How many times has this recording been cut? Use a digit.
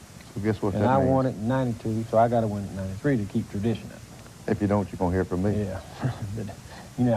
1